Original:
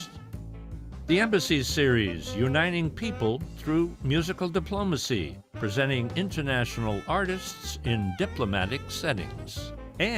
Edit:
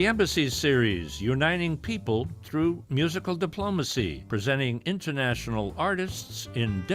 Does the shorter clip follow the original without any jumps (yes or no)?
no